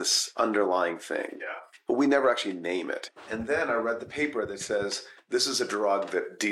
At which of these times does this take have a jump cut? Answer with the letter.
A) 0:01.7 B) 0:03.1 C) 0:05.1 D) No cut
C